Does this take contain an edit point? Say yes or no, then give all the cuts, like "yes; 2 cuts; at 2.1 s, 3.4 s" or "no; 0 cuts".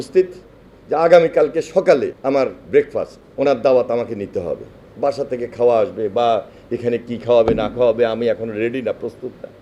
yes; 2 cuts; at 2.2 s, 3.2 s